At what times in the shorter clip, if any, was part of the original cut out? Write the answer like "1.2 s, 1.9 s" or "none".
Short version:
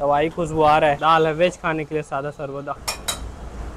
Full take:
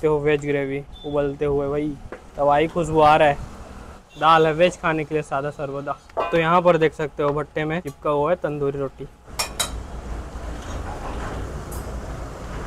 1.0 s, 2.8 s